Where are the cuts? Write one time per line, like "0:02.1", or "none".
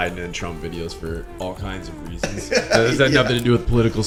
none